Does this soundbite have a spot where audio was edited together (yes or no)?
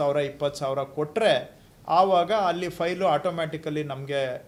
no